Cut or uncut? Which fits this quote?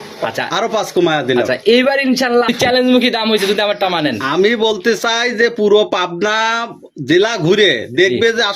uncut